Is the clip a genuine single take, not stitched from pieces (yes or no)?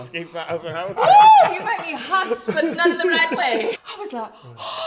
no